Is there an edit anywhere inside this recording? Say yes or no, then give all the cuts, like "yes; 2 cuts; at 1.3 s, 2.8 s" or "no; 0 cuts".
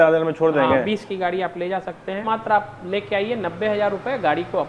yes; 1 cut; at 2.2 s